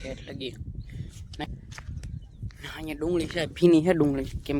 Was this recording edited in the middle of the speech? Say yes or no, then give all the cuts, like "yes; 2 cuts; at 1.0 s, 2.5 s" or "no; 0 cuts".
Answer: yes; 1 cut; at 1.4 s